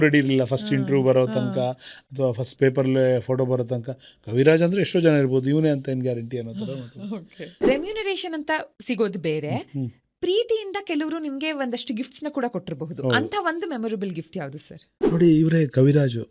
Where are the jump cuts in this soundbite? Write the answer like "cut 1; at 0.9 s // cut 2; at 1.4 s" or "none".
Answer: cut 1; at 7.6 s // cut 2; at 14.9 s